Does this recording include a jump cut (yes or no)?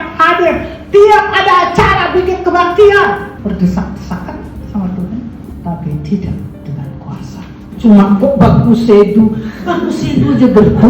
yes